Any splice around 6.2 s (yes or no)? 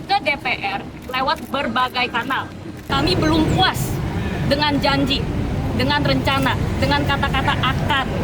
no